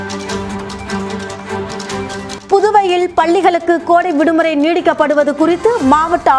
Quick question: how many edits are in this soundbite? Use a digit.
1